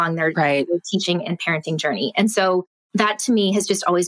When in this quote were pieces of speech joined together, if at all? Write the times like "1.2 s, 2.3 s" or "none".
2.8 s